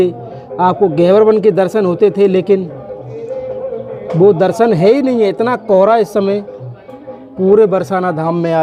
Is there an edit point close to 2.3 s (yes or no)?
no